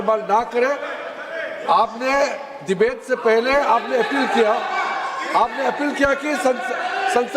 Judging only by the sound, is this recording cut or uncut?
uncut